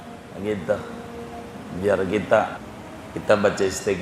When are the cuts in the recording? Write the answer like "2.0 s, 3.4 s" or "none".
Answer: 2.6 s